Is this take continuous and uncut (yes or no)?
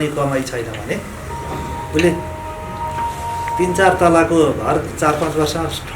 yes